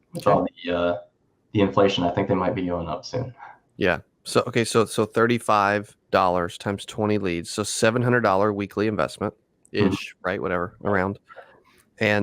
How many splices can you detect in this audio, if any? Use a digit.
1